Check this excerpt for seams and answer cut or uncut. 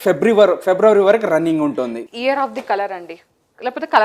cut